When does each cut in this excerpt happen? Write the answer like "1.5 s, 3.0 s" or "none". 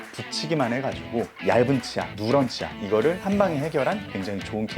1.4 s